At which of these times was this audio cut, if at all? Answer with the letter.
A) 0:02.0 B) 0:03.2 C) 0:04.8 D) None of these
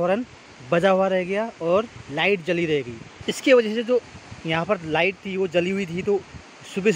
D